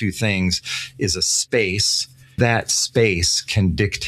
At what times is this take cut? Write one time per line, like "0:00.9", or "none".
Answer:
0:02.4